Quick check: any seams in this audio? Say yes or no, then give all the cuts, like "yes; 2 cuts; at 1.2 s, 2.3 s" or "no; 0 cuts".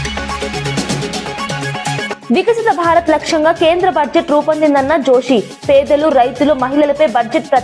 no; 0 cuts